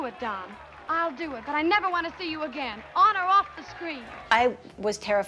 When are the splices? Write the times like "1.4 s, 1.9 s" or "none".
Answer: 4.2 s